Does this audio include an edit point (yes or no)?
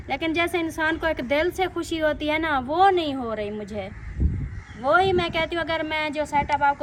no